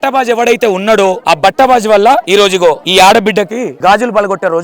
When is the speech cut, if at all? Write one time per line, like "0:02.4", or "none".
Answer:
0:01.2
0:02.4
0:03.7